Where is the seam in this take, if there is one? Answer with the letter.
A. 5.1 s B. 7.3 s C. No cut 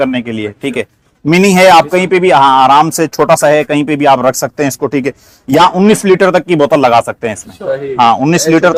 C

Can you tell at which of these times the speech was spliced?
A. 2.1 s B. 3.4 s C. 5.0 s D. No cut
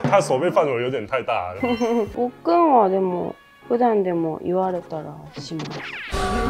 A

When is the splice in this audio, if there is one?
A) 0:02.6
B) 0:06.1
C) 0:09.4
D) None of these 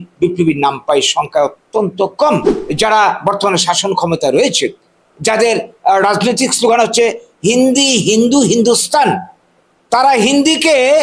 A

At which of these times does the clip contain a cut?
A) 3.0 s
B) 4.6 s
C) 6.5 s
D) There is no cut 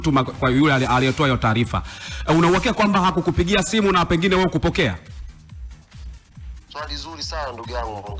D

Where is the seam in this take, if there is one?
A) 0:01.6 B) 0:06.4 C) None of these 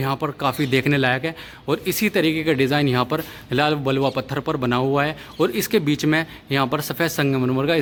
C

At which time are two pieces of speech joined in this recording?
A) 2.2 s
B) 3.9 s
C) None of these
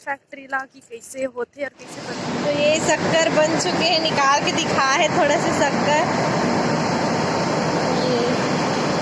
A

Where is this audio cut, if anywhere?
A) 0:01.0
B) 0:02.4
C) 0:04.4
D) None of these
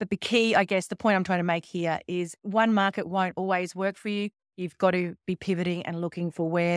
B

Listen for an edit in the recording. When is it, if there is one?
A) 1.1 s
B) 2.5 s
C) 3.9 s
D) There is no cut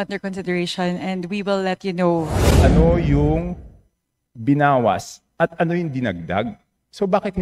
B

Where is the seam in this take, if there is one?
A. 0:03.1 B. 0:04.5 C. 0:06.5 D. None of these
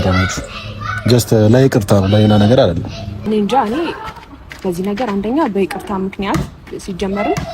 A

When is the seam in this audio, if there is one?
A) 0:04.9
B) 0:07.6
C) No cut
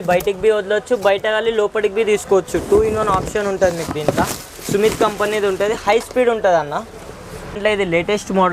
B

